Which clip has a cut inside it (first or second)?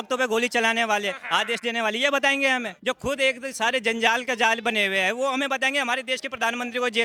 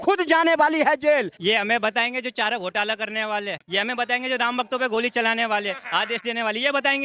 second